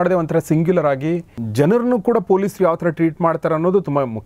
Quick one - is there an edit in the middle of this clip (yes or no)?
yes